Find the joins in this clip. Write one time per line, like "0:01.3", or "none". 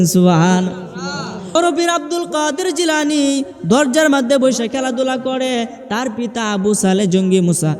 0:01.5